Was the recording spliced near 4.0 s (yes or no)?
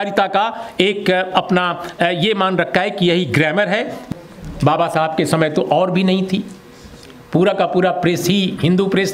yes